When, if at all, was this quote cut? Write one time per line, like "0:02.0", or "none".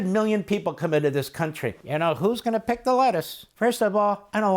0:01.7
0:03.4